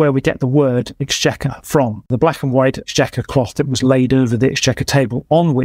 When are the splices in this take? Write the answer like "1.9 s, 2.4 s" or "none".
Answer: 2.1 s